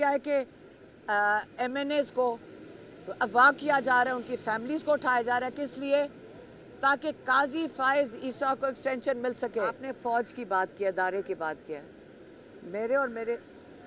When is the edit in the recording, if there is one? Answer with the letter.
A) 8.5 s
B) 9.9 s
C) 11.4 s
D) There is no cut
B